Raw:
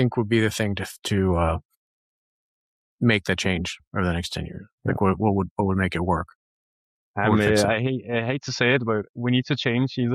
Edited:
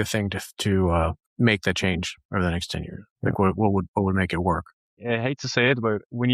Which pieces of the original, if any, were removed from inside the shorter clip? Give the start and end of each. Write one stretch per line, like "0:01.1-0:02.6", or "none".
0:01.7-0:02.9
0:06.6-0:08.0